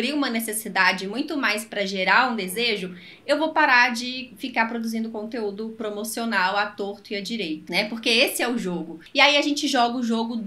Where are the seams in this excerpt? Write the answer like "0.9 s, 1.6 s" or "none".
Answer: 7.6 s, 9.0 s

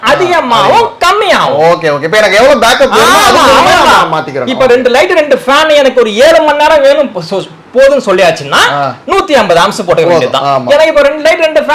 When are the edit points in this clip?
none

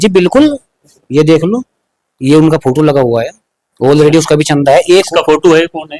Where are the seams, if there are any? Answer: none

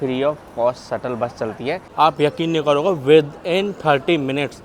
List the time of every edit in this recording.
1.8 s

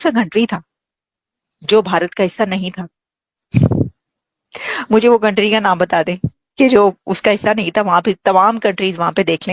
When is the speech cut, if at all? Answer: none

